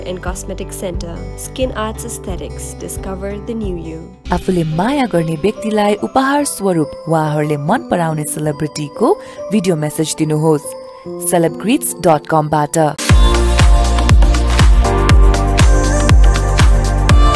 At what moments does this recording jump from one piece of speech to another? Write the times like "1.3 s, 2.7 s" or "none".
none